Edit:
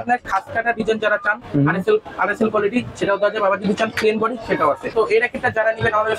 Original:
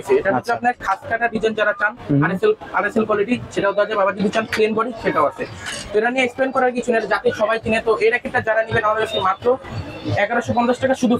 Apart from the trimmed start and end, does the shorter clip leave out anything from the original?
yes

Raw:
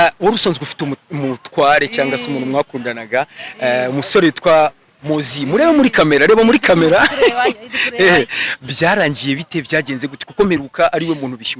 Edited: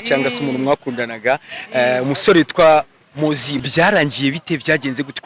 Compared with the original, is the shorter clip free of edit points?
no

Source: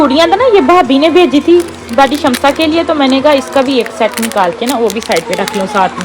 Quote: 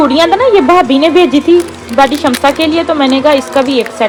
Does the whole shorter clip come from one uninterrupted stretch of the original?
yes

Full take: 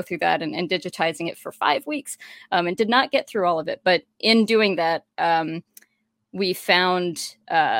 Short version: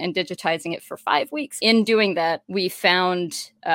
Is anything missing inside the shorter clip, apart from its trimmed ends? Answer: yes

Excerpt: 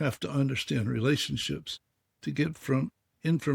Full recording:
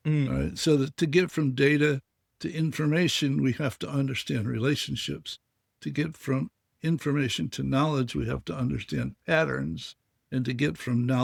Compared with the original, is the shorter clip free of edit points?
yes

